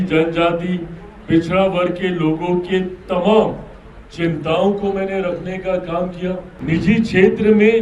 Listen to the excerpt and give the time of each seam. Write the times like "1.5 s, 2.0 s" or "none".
6.5 s